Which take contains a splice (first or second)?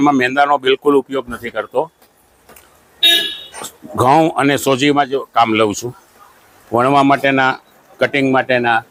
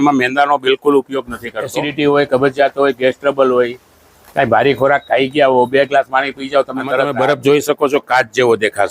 second